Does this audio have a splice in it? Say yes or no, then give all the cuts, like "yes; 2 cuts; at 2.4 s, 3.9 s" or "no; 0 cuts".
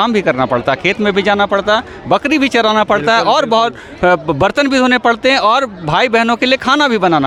no; 0 cuts